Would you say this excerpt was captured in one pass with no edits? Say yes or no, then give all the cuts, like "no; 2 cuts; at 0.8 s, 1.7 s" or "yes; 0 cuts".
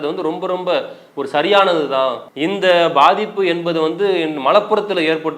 no; 1 cut; at 2.3 s